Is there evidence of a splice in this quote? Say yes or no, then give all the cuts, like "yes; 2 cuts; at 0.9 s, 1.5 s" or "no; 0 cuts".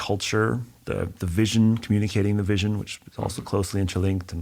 no; 0 cuts